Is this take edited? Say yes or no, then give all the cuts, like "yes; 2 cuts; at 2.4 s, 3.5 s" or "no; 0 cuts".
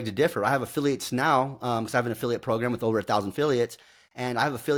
no; 0 cuts